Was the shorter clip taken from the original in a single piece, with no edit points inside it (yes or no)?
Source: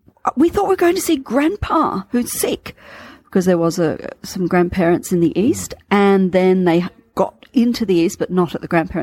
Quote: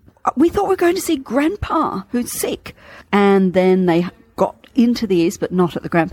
no